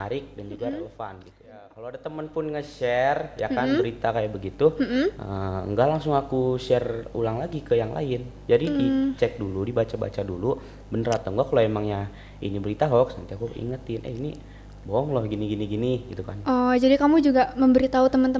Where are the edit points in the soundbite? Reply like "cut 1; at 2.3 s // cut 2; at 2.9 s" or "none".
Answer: cut 1; at 1.7 s